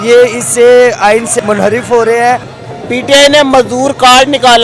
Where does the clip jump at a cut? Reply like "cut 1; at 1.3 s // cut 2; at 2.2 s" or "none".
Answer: cut 1; at 1.3 s // cut 2; at 2.5 s